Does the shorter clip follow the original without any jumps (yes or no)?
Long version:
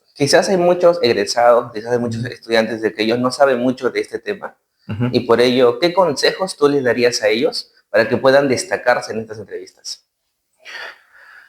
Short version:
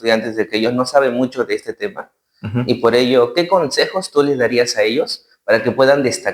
yes